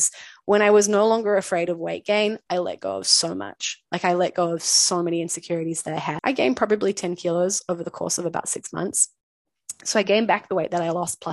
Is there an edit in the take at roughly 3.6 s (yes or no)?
no